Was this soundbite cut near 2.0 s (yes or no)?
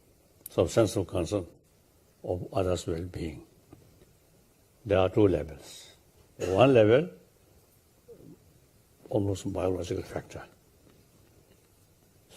yes